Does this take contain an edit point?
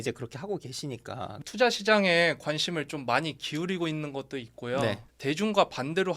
yes; 2 cuts; at 1.4 s, 5.1 s

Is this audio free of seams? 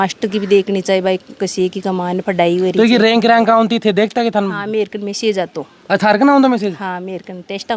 yes; 0 cuts

